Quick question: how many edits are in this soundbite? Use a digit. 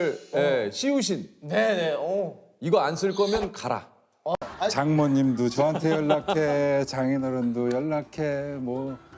1